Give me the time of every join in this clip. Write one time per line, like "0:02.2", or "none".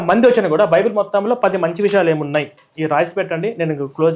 none